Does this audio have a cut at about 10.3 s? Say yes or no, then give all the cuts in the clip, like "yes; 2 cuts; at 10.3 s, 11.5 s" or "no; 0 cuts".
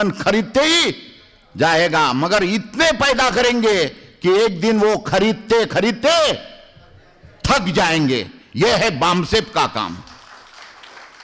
no; 0 cuts